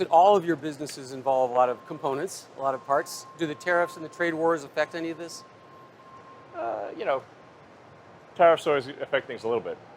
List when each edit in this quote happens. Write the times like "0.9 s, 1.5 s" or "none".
6.6 s